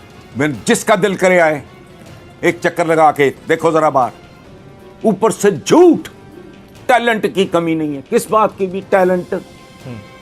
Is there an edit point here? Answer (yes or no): no